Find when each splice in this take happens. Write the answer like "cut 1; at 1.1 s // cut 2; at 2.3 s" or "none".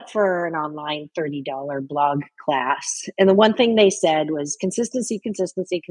none